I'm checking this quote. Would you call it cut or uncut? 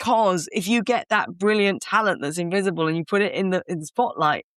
uncut